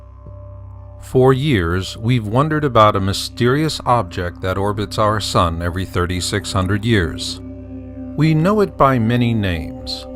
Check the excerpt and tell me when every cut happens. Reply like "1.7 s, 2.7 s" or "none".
3.0 s